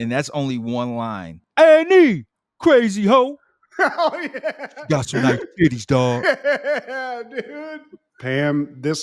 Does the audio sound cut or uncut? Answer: cut